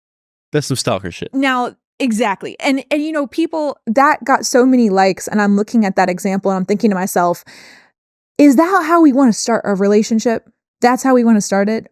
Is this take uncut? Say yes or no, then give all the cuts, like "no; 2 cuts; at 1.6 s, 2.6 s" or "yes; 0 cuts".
yes; 0 cuts